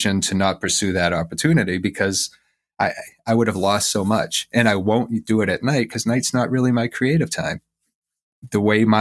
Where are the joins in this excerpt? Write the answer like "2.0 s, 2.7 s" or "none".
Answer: 7.6 s